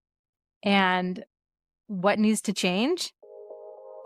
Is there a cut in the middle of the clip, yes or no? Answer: no